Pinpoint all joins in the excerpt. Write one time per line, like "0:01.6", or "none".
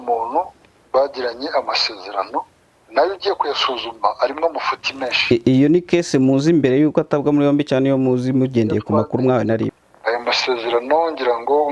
0:09.7